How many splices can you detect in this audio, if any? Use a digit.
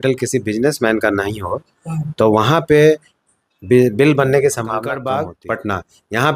1